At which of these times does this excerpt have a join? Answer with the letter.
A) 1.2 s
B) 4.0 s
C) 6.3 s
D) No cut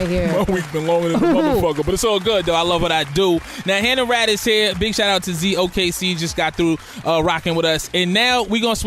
B